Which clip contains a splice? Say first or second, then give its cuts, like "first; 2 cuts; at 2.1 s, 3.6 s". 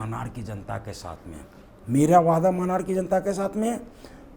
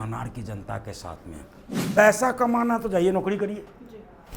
second; 1 cut; at 1.7 s